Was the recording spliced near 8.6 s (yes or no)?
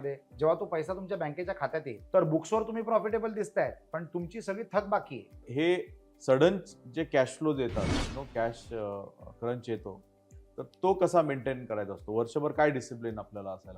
no